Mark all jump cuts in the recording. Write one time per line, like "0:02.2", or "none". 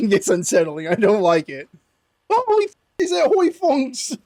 none